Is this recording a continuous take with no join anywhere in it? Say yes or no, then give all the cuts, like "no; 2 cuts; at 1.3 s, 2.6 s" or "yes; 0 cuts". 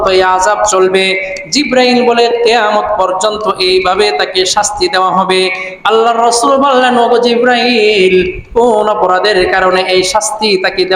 yes; 0 cuts